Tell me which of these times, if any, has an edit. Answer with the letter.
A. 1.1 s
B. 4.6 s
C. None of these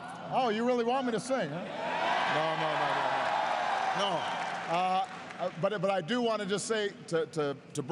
C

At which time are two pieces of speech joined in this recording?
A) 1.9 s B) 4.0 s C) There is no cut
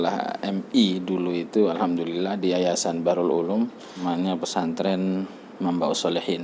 B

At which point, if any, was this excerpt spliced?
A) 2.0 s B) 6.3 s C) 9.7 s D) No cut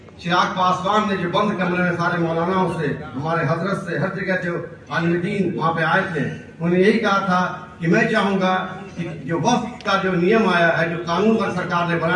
D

